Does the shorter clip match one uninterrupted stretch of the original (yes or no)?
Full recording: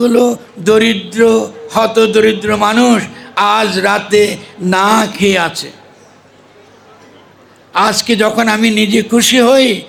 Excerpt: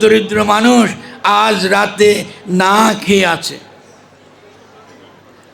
yes